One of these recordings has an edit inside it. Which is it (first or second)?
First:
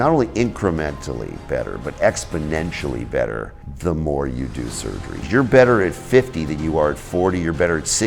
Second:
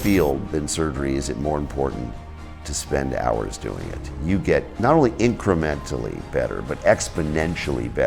first